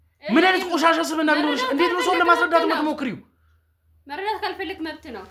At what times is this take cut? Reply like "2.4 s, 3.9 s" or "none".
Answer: none